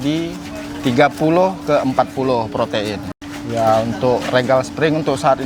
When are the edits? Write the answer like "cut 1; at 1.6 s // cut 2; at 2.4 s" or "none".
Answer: cut 1; at 3.1 s